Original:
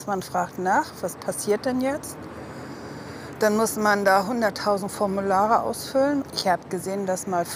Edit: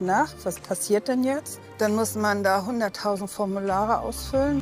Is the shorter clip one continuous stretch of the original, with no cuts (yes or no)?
no